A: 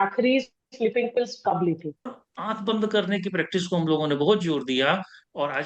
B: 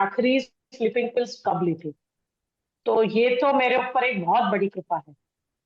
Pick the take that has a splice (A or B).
A